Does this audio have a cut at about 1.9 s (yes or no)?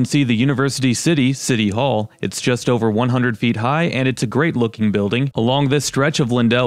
no